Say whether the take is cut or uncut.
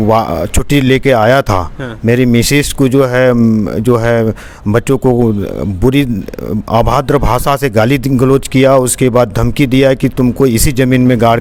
uncut